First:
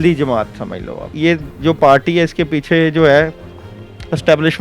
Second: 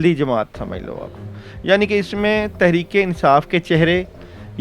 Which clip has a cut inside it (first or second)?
first